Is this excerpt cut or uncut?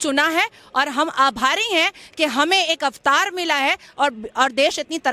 uncut